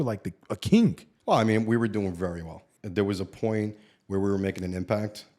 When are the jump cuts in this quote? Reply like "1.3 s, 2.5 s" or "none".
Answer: 1.1 s, 2.6 s